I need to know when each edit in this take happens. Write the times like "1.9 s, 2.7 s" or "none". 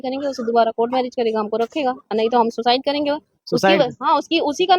none